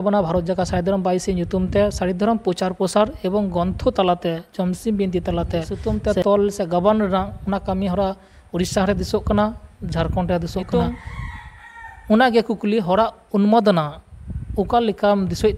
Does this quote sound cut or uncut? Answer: cut